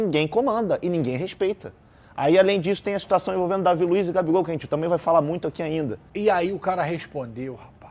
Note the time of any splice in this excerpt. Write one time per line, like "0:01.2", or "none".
0:06.0